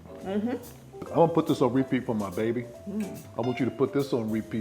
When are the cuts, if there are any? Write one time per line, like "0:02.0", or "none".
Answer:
0:01.1